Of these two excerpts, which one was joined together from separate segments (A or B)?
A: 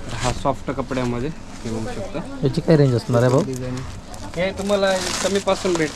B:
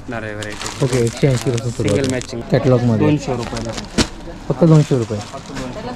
B